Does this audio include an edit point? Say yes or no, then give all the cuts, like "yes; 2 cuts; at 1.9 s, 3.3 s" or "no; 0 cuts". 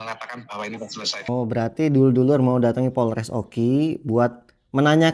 yes; 1 cut; at 1.3 s